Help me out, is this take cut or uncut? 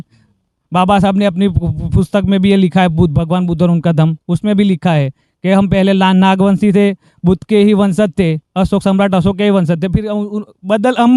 uncut